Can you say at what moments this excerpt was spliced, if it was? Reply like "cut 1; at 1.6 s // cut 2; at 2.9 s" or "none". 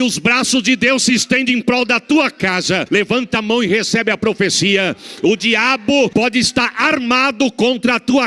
cut 1; at 2.8 s // cut 2; at 6.1 s